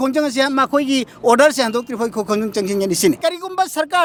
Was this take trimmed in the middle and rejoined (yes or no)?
no